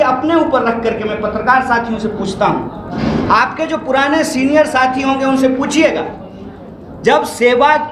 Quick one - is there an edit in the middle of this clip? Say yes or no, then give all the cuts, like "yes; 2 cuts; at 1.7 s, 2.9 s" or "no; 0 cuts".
no; 0 cuts